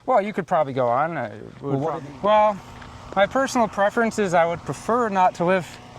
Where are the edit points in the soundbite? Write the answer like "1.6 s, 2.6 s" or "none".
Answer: 2.0 s